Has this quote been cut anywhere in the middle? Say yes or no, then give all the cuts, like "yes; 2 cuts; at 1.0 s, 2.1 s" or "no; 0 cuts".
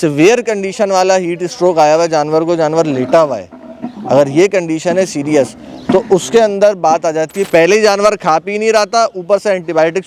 yes; 1 cut; at 7.4 s